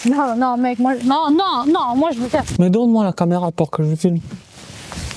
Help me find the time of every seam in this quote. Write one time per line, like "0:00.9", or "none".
0:02.5
0:04.3